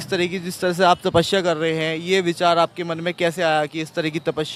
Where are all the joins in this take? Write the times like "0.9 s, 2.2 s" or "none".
none